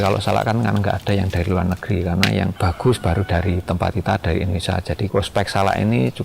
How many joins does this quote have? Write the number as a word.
two